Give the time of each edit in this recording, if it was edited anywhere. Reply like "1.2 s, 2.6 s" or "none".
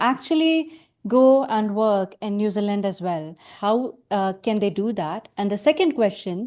3.5 s